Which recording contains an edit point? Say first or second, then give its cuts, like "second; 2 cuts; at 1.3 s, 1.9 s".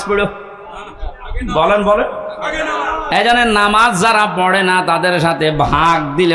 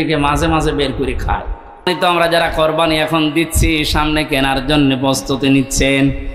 second; 1 cut; at 1.9 s